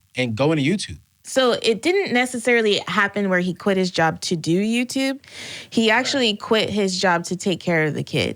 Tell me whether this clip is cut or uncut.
cut